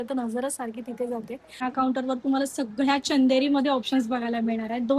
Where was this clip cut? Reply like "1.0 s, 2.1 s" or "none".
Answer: 1.6 s